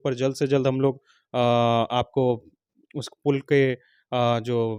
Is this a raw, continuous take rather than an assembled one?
yes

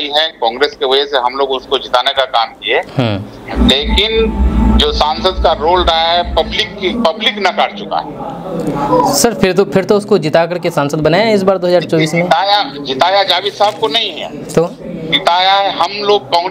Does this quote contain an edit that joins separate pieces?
no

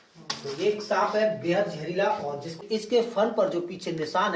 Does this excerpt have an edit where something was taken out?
yes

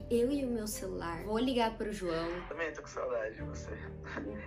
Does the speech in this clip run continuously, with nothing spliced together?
no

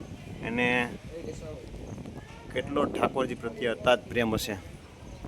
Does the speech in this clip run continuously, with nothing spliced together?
yes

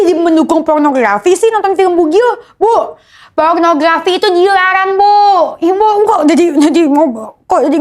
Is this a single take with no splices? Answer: yes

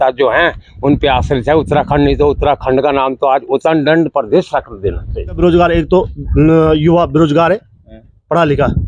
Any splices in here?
yes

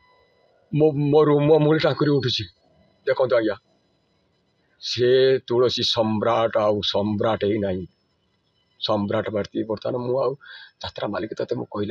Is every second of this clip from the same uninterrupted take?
yes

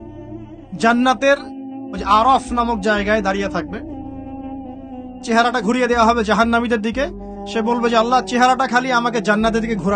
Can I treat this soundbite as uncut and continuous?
no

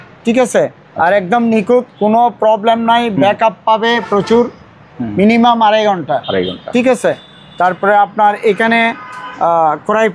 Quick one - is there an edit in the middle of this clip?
no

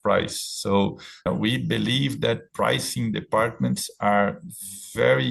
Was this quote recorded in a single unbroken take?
no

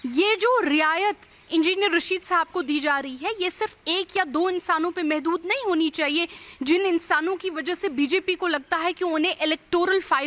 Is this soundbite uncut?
yes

